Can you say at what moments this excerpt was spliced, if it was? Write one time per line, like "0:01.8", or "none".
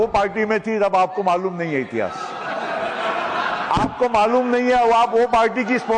none